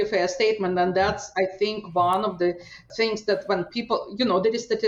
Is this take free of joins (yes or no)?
yes